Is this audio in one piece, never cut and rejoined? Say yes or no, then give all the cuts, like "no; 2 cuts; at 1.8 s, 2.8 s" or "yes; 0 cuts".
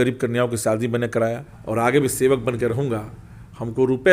no; 1 cut; at 1.5 s